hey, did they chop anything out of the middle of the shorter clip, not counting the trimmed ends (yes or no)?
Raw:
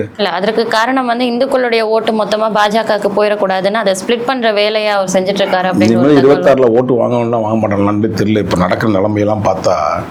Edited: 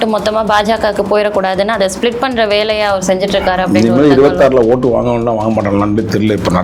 no